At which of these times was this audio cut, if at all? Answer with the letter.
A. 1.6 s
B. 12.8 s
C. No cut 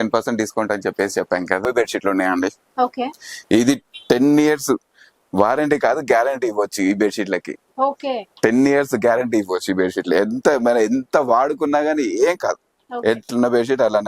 A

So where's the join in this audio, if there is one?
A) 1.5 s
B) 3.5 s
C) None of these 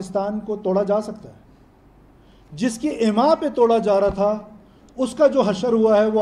C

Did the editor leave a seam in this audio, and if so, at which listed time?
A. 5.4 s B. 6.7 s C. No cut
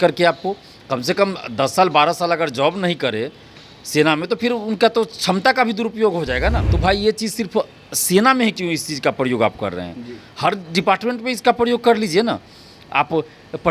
B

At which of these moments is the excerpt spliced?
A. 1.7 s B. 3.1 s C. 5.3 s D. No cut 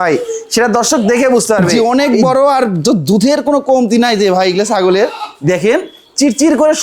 A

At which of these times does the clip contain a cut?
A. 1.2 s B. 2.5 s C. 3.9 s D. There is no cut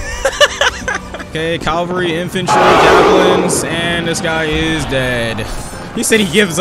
A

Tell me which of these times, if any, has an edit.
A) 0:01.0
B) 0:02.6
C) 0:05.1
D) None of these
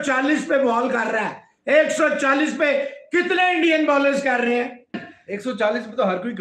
C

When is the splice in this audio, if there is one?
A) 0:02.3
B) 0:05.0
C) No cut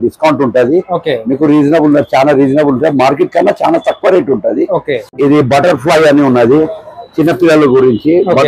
B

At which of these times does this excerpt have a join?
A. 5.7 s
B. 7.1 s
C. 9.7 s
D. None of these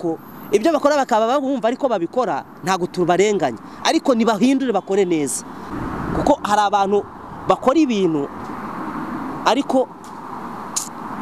A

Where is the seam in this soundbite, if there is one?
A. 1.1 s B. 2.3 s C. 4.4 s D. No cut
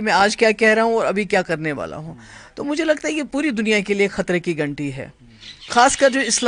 D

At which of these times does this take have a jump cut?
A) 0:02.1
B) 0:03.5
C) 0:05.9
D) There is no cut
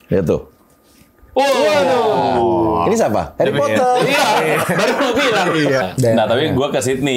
C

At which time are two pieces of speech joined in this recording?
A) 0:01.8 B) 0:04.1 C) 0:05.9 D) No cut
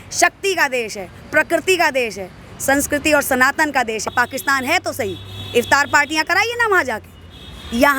B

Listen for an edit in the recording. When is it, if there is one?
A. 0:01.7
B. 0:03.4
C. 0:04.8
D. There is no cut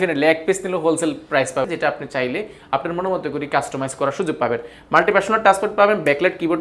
A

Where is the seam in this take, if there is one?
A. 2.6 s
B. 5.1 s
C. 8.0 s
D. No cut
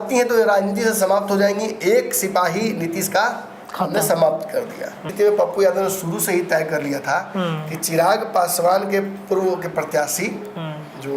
B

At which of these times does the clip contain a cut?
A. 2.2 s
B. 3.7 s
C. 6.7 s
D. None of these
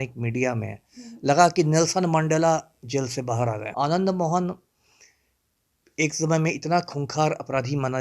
B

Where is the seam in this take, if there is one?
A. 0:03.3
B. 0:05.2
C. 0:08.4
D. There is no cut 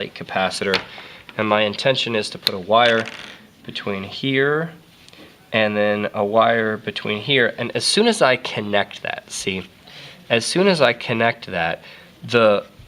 C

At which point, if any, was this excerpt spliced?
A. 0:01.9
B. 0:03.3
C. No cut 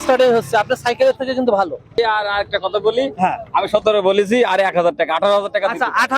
A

